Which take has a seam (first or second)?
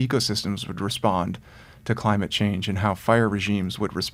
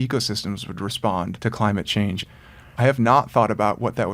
second